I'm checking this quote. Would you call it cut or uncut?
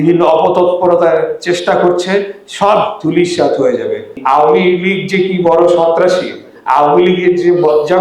cut